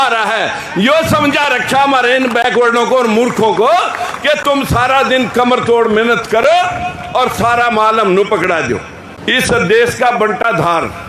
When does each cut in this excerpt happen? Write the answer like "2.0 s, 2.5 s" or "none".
none